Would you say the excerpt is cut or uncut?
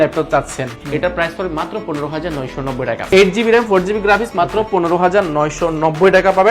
cut